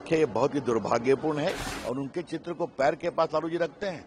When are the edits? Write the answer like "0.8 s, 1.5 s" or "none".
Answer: 1.7 s